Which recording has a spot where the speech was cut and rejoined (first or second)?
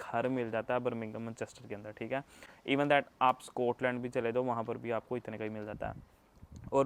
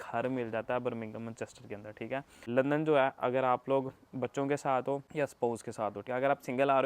second